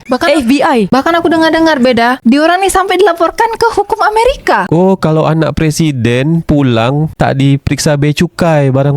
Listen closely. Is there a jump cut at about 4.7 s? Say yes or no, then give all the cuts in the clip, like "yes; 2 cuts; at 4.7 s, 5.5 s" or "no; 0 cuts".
yes; 1 cut; at 4.7 s